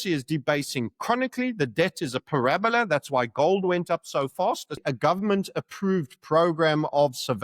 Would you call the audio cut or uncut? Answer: cut